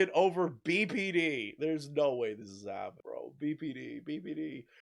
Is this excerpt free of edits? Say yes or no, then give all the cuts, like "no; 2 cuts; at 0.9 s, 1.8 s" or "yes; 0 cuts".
yes; 0 cuts